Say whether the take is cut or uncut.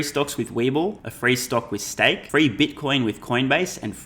cut